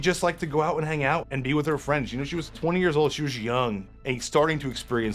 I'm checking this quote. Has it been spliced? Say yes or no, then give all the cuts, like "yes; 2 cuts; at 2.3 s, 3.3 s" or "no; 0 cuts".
yes; 3 cuts; at 1.3 s, 2.6 s, 3.9 s